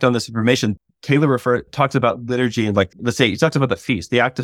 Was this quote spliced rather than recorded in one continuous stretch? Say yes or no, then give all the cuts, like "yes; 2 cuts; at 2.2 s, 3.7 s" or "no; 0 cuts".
yes; 3 cuts; at 0.7 s, 1.7 s, 3.0 s